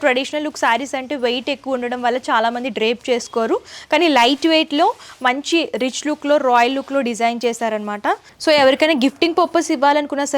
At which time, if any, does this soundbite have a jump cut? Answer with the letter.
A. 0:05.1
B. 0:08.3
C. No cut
B